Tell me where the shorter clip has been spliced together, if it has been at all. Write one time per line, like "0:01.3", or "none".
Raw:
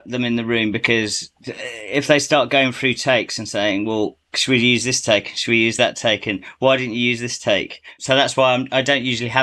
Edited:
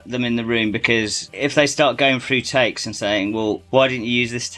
0:01.2
0:03.6